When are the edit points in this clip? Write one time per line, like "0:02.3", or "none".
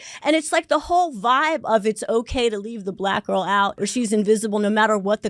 0:03.7